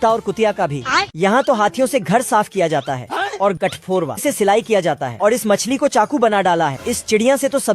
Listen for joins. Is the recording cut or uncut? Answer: cut